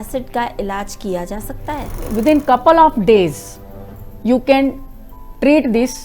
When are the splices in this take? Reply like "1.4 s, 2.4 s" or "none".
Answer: 2.0 s